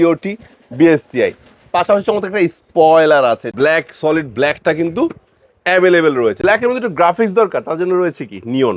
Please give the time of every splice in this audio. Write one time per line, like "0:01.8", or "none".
0:03.5
0:06.4